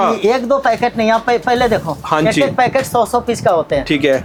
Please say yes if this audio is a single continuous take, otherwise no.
yes